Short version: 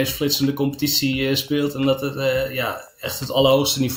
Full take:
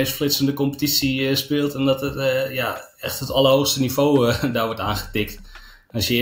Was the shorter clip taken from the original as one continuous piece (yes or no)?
yes